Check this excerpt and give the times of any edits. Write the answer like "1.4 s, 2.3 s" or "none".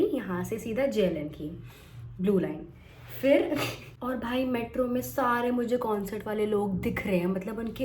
none